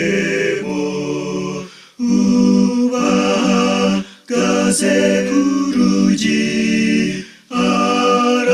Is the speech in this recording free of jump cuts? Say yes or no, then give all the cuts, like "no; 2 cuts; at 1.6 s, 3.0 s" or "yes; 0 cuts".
no; 1 cut; at 6.9 s